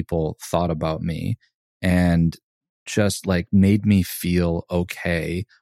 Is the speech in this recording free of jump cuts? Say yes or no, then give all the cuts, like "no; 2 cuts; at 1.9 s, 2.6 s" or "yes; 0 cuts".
no; 1 cut; at 2.7 s